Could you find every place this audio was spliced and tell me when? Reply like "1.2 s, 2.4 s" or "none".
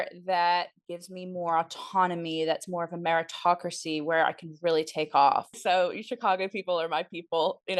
5.6 s